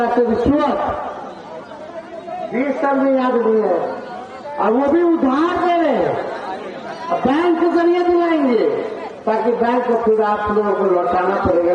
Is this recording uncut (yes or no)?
yes